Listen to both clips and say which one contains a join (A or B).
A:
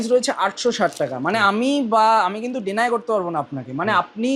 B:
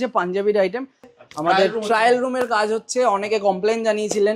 B